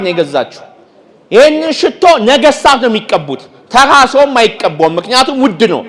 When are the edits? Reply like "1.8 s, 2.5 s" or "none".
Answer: none